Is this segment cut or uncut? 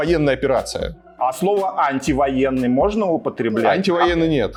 uncut